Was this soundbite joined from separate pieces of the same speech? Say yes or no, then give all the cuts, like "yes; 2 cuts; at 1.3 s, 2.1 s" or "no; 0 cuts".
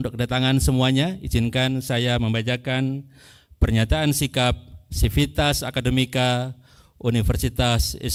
no; 0 cuts